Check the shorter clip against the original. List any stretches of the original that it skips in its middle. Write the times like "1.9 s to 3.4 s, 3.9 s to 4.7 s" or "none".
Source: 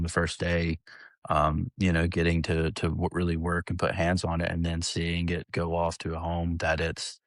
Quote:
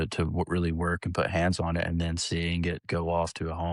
none

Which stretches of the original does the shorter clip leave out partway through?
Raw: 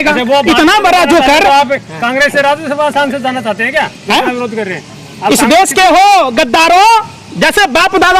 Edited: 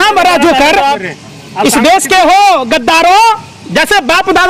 1.7 s to 4.7 s

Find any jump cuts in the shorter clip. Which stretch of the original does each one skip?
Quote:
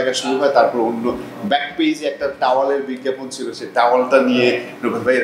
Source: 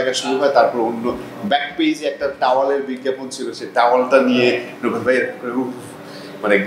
none

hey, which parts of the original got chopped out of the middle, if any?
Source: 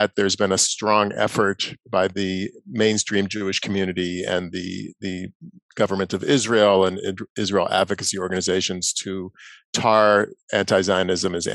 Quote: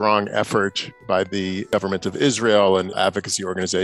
2.5 s to 5.7 s, 7.0 s to 7.7 s

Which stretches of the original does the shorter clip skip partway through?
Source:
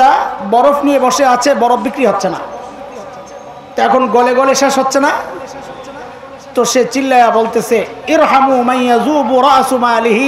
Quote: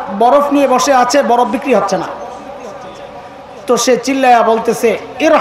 3.6 s to 6.2 s

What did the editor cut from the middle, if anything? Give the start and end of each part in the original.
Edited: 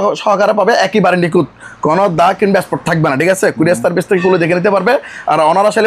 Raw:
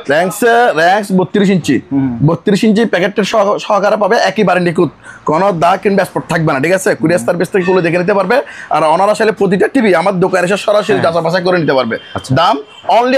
none

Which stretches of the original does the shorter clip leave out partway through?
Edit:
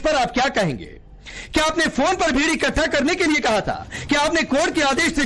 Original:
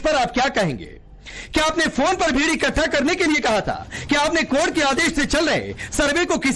none

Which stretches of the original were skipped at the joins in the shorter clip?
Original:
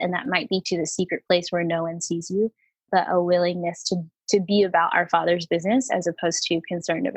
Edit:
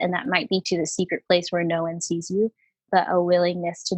none

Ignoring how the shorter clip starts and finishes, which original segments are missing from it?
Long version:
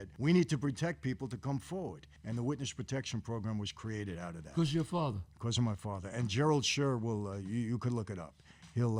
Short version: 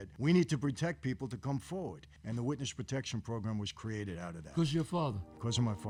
none

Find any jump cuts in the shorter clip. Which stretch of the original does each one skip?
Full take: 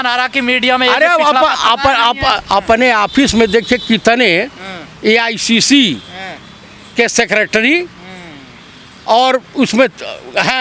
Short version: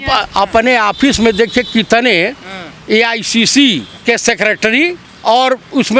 6.1 s to 6.8 s, 8.0 s to 8.9 s

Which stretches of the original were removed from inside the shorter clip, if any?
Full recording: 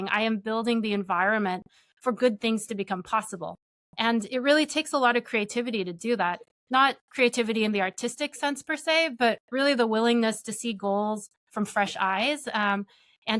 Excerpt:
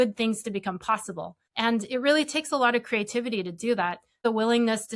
3.6 s to 3.8 s, 6.6 s to 9.8 s

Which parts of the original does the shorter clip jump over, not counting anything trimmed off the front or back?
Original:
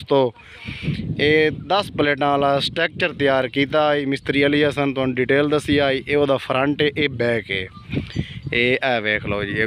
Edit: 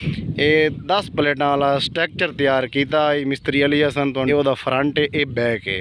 5.1 s to 6.1 s

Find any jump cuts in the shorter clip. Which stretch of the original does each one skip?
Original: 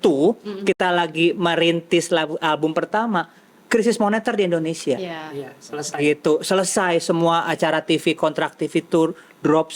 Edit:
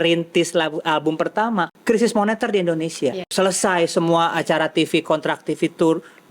3.3 s to 3.6 s, 5.2 s to 6.4 s

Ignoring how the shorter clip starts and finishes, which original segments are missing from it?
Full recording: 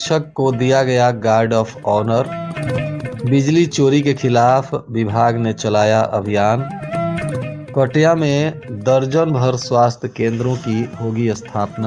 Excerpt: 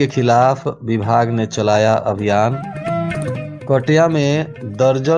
none

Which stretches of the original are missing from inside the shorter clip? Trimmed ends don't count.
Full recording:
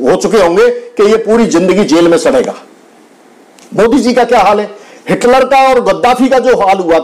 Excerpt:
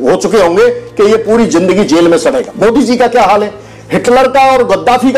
2.5 s to 3.7 s

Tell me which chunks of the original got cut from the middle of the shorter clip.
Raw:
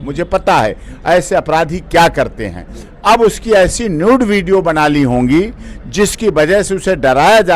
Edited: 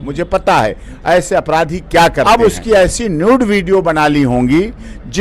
2.2 s to 3.1 s

